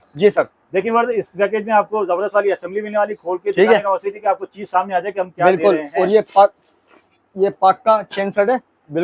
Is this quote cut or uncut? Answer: uncut